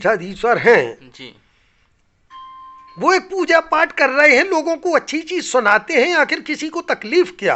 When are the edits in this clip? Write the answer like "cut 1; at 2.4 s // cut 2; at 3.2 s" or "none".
none